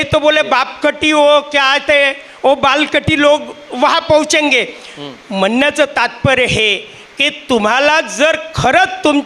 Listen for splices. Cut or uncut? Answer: uncut